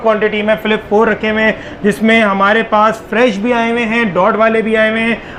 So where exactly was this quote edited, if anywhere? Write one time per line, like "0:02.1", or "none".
none